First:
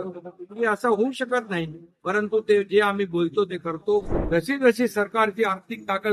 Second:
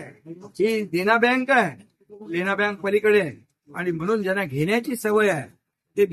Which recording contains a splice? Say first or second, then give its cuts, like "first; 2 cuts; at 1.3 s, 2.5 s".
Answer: first; 1 cut; at 4.2 s